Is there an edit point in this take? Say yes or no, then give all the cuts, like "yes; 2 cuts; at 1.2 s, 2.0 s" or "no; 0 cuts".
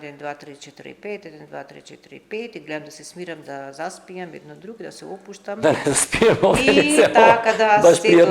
no; 0 cuts